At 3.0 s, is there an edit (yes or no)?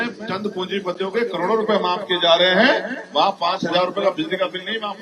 no